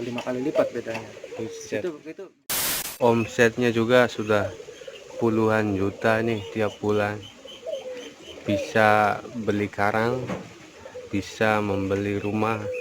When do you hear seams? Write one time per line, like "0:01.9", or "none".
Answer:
0:02.4